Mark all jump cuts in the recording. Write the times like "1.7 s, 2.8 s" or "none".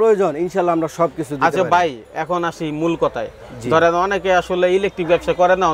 none